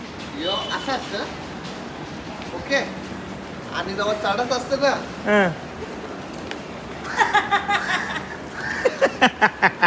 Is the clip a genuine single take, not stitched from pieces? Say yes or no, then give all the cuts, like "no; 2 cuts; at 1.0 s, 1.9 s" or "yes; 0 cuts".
yes; 0 cuts